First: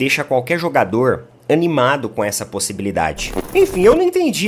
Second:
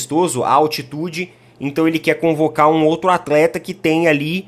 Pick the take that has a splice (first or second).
first